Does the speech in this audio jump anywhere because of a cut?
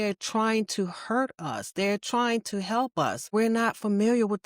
yes; 1 cut; at 3.3 s

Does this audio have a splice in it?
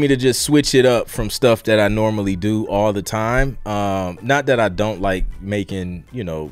no; 0 cuts

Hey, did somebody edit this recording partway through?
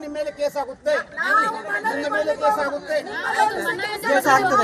no; 0 cuts

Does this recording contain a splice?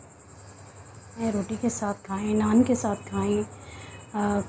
yes; 1 cut; at 1.2 s

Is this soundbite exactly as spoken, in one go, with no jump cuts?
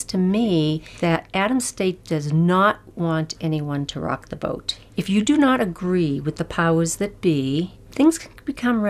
yes; 0 cuts

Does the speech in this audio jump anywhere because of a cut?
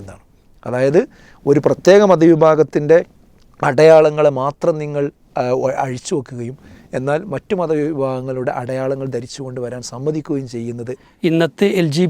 yes; 1 cut; at 11.0 s

